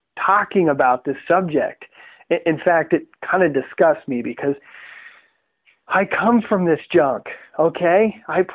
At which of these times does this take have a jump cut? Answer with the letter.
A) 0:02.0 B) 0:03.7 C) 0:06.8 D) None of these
A